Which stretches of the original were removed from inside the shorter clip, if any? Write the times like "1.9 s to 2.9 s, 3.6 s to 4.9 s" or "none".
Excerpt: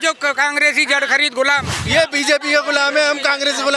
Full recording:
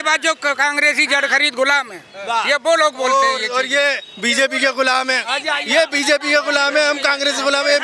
2.0 s to 5.6 s